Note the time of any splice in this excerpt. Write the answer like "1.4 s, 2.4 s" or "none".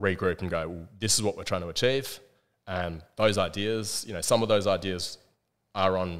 none